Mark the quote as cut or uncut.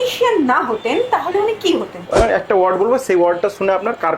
cut